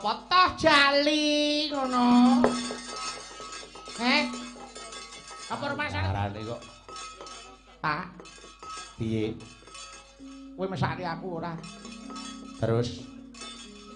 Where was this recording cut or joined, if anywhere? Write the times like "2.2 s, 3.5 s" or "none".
6.0 s

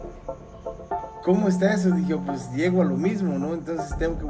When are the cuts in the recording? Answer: 1.2 s

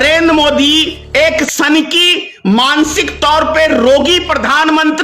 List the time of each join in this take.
1.5 s

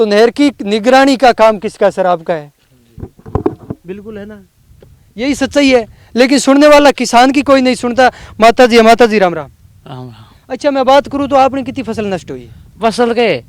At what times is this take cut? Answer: none

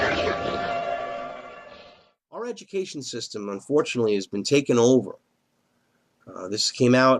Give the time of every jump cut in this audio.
2.6 s

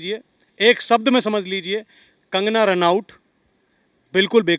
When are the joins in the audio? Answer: none

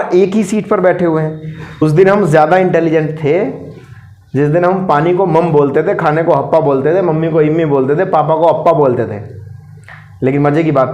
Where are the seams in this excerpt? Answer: 1.8 s

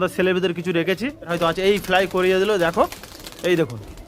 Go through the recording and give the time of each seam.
1.3 s

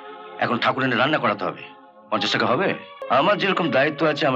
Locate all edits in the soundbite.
2.9 s

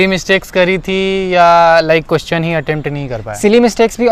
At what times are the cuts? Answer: none

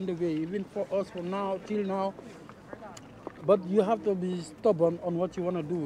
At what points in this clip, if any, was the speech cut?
none

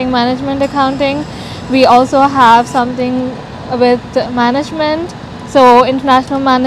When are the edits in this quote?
none

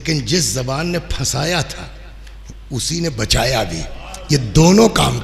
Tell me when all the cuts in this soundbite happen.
none

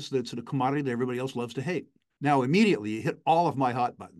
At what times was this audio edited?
2.0 s

